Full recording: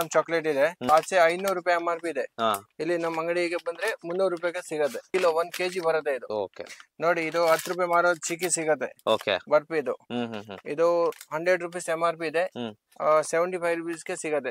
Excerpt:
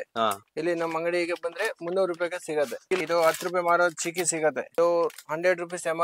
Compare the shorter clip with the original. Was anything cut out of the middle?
yes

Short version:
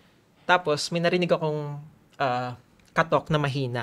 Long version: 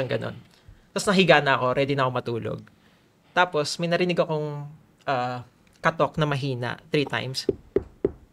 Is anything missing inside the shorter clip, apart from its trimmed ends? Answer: no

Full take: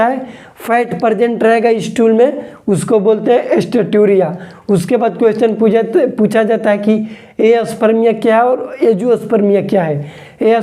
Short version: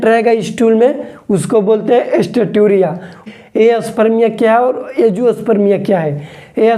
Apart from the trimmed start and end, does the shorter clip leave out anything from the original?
yes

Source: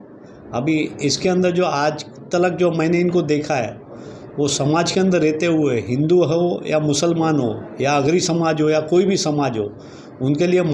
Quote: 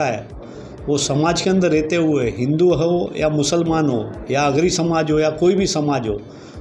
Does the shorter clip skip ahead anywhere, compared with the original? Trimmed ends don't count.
no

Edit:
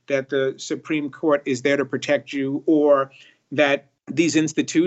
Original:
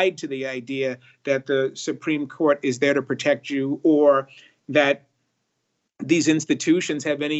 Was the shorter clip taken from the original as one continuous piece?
no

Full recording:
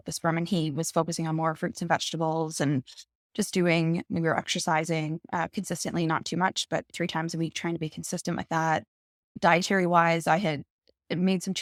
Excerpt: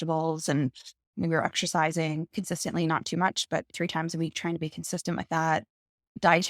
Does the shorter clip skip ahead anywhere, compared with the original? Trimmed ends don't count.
yes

